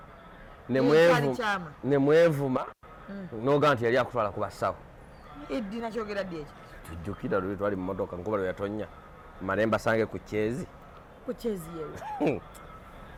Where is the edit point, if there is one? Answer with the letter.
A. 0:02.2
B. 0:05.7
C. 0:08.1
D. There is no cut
D